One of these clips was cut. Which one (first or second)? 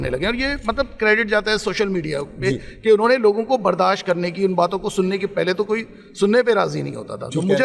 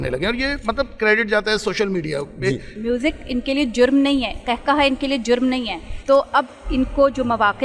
second